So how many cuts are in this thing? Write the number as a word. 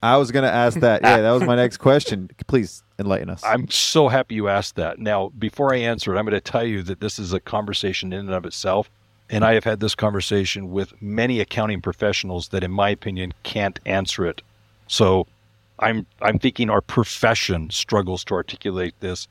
one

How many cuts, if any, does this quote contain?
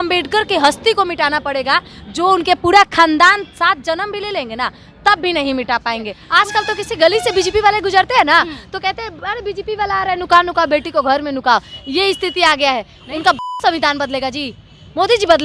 two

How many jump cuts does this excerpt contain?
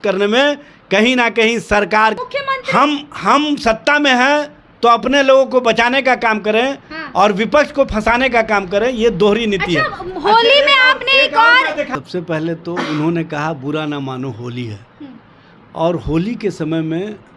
two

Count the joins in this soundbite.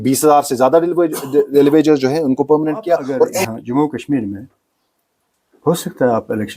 one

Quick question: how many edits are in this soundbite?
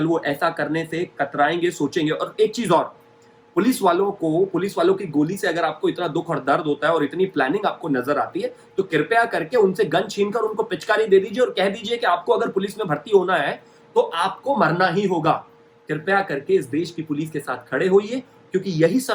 zero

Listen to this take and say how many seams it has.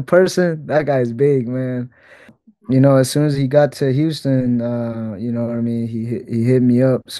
one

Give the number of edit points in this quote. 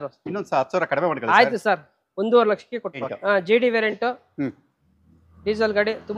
one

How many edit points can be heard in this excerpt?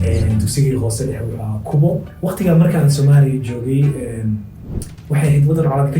one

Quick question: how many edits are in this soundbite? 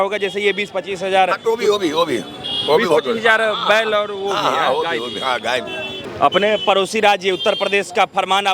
one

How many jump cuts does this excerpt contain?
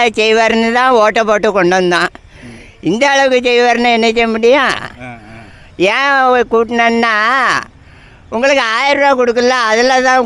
zero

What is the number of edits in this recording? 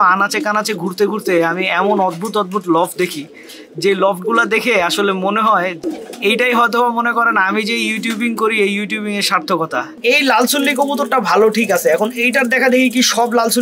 two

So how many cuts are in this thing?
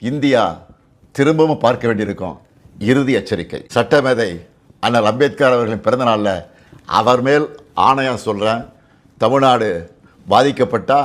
two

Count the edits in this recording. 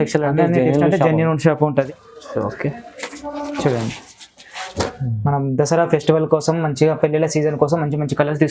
one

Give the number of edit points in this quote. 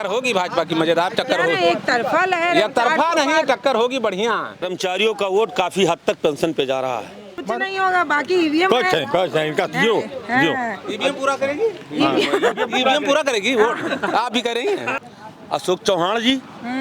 three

